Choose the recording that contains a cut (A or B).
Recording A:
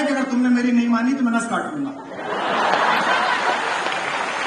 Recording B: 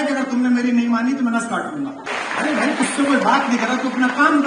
B